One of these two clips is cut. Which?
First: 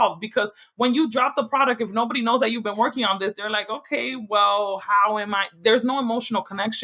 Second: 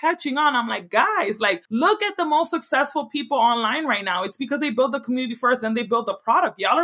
second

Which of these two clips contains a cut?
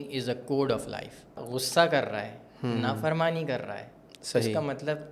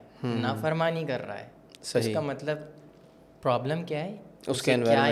first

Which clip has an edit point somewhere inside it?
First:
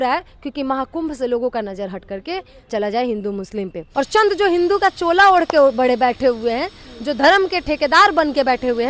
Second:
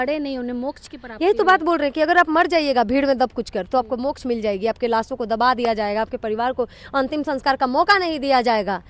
first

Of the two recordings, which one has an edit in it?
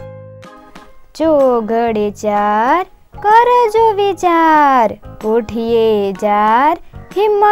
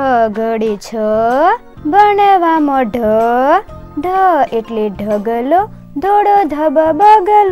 first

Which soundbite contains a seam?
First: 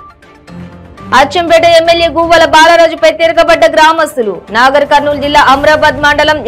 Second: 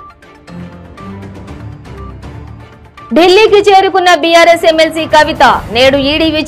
second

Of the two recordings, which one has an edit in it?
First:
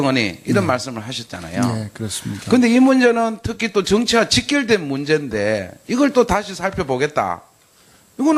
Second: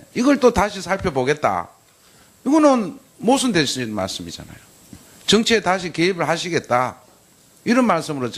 first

